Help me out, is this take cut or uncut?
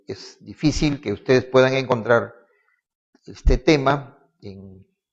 uncut